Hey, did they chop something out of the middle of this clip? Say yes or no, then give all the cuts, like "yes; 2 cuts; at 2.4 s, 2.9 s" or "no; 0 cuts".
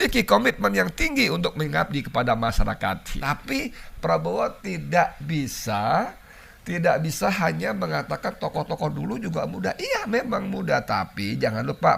yes; 1 cut; at 3.1 s